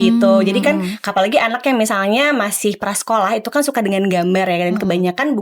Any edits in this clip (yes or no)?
no